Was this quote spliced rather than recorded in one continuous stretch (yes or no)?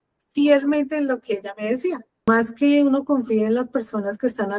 yes